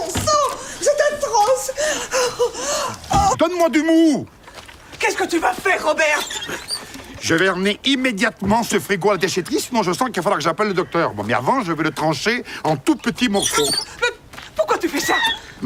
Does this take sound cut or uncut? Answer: uncut